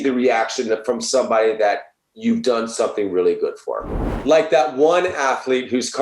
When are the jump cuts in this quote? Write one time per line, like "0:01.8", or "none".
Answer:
0:03.8